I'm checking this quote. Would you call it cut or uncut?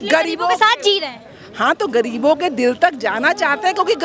uncut